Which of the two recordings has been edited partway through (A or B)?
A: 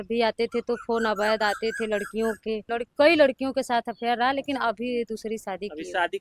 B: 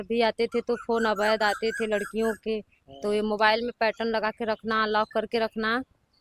A